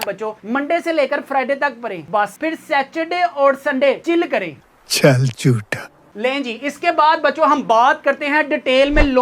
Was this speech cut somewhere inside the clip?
no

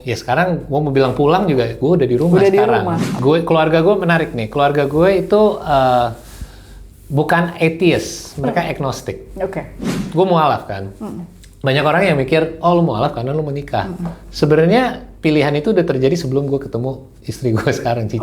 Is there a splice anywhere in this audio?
yes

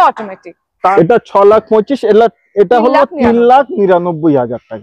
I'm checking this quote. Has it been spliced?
yes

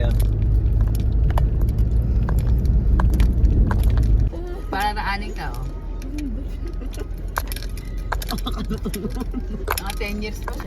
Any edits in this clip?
yes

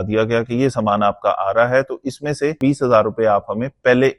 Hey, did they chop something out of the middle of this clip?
yes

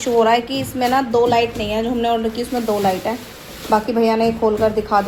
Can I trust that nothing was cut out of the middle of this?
yes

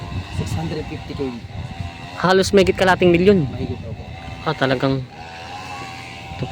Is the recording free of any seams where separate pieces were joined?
yes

